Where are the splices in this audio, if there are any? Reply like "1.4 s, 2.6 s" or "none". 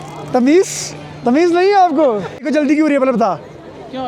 2.4 s